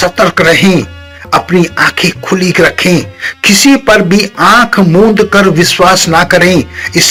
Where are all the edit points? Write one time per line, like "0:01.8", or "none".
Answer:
none